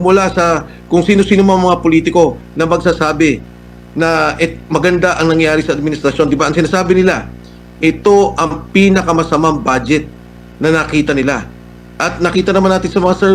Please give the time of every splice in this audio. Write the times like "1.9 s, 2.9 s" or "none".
none